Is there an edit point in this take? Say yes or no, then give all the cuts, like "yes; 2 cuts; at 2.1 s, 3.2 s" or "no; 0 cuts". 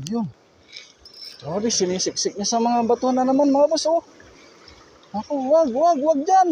no; 0 cuts